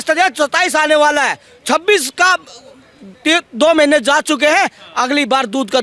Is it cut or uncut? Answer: uncut